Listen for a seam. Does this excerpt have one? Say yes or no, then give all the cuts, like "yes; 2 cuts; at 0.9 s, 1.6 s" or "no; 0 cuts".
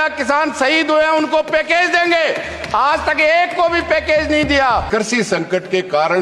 yes; 1 cut; at 4.9 s